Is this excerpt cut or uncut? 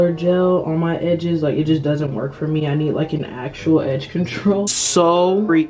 cut